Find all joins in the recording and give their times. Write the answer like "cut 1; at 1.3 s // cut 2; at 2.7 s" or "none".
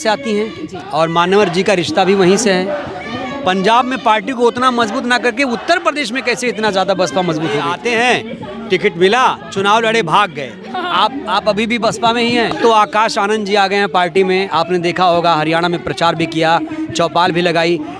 cut 1; at 7.7 s // cut 2; at 12.5 s